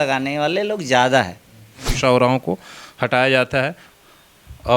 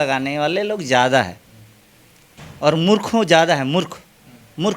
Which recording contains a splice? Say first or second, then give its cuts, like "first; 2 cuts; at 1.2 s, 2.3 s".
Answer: first; 1 cut; at 1.9 s